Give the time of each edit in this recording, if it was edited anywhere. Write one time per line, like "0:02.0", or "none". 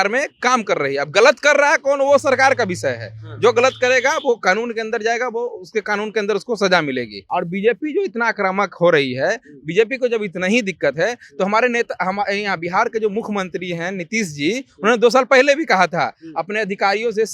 0:07.2

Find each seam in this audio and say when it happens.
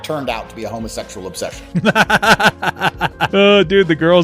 0:01.6
0:03.3

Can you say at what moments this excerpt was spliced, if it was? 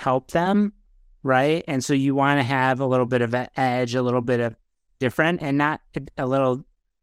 none

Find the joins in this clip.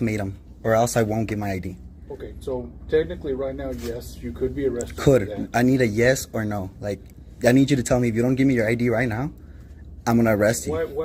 none

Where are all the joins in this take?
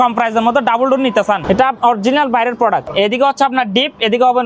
0:01.4
0:02.9

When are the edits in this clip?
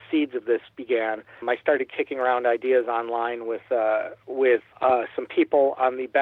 0:01.4
0:04.7

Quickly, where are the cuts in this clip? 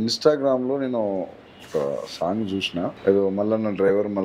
0:03.0

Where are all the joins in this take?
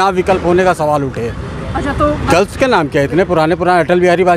none

